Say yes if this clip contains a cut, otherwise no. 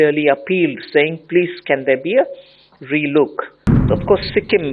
yes